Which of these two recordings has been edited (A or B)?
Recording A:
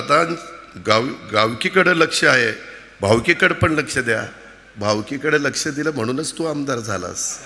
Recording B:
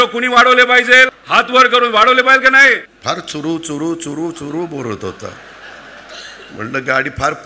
B